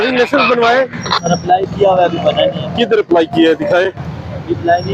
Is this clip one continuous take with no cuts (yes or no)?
yes